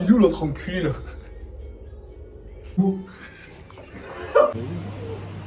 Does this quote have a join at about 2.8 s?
no; 0 cuts

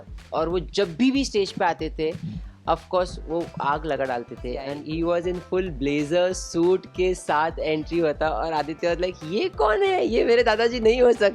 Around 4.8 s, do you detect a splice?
yes; 1 cut; at 4.8 s

